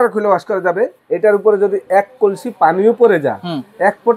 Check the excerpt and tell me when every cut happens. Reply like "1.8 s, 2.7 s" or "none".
1.0 s